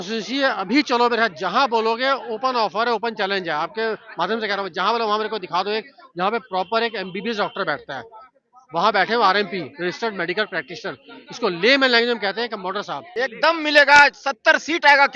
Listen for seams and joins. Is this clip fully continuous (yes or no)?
no